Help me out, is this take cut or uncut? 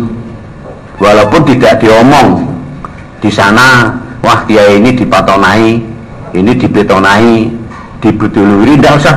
uncut